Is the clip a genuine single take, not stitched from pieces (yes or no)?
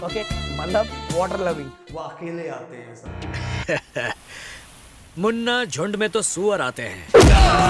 no